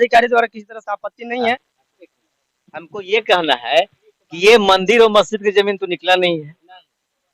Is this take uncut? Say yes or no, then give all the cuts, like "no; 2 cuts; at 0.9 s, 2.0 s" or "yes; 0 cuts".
no; 1 cut; at 2.3 s